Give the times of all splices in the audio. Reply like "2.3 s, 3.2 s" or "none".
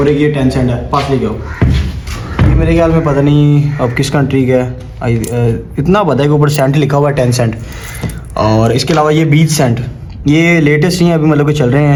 none